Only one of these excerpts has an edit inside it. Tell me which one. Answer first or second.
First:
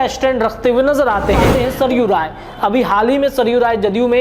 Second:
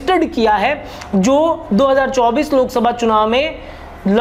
first